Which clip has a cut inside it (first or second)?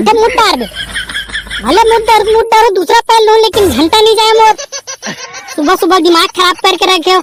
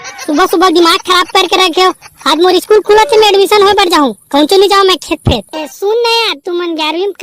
second